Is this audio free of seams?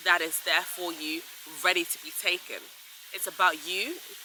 yes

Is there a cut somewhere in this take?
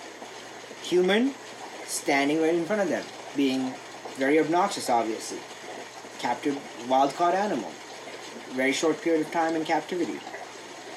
no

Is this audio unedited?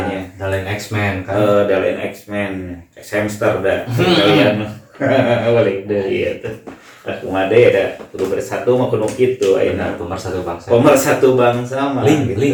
yes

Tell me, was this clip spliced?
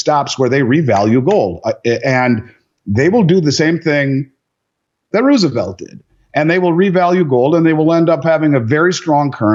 no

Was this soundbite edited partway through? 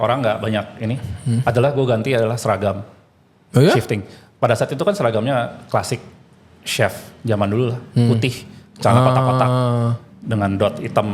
no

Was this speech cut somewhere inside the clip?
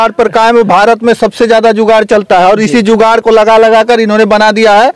no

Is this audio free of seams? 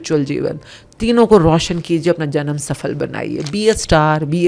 yes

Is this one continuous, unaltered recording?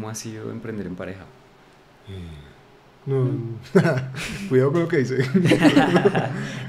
no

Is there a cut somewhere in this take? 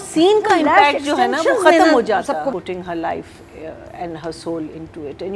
yes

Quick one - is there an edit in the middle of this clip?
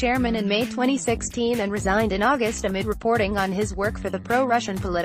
no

